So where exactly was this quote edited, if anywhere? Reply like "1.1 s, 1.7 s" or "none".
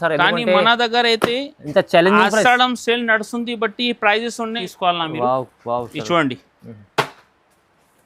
4.6 s